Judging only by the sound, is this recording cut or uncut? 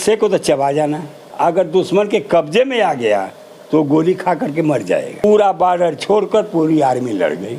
cut